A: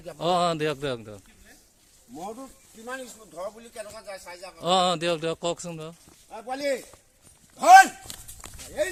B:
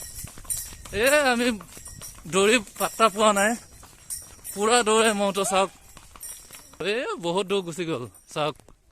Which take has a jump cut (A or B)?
B